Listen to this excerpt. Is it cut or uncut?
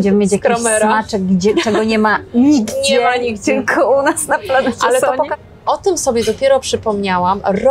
cut